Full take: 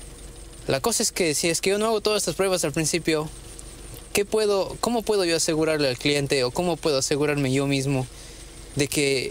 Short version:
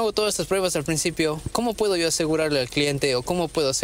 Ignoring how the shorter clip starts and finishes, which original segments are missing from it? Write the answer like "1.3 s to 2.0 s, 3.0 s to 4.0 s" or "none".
3.3 s to 4.7 s